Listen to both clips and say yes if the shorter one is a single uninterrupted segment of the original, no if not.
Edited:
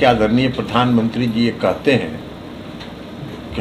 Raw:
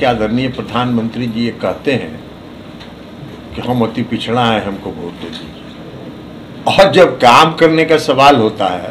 yes